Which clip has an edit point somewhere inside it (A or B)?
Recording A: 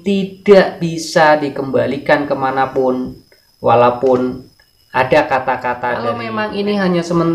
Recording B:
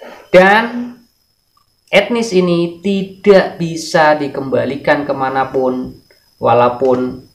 A